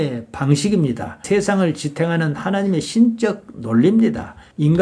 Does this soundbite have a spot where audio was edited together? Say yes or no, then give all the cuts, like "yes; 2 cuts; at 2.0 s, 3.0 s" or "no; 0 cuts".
yes; 1 cut; at 1.2 s